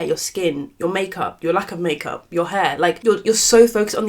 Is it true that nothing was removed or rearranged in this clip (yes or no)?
no